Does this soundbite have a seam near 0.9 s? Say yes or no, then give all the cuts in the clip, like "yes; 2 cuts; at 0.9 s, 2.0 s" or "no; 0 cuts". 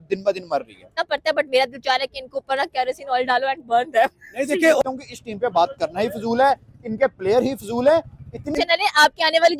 yes; 3 cuts; at 0.9 s, 4.8 s, 8.6 s